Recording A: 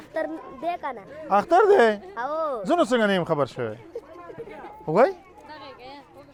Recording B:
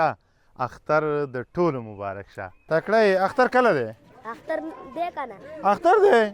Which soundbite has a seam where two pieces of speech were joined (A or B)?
B